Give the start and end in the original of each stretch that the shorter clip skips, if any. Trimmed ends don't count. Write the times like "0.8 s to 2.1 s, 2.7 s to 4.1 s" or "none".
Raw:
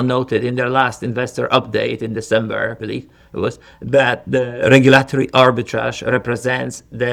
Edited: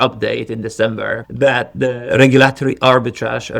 2.8 s to 3.8 s

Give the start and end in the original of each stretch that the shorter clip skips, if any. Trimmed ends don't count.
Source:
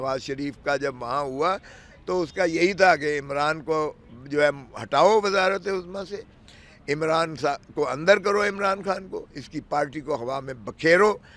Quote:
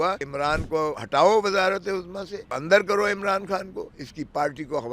2.1 s to 4.5 s, 6.4 s to 8.0 s

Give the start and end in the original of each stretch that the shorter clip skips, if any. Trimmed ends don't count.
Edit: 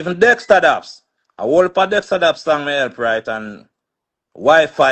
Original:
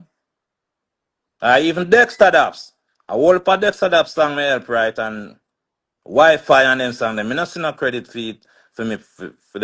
none

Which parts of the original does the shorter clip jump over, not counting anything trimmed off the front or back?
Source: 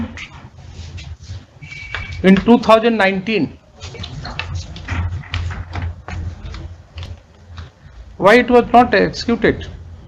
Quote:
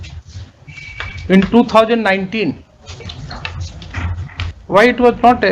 5.5 s to 8.0 s

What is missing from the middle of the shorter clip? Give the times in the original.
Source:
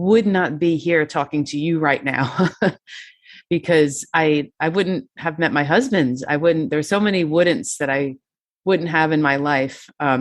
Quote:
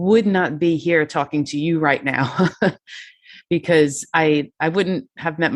none

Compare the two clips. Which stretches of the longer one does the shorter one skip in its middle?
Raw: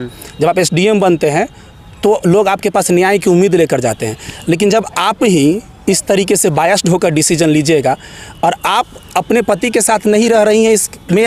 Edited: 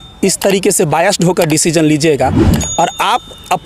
none

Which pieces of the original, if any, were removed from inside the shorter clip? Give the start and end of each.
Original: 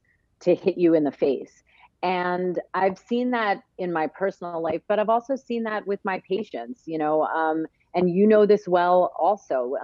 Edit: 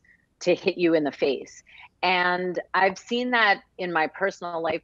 none

